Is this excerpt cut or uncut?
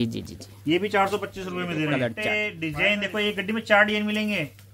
cut